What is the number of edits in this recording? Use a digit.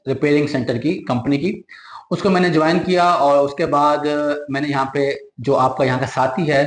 0